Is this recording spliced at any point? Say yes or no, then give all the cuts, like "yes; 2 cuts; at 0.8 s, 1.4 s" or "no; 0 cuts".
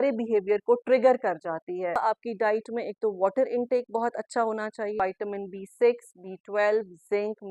yes; 2 cuts; at 2.0 s, 5.0 s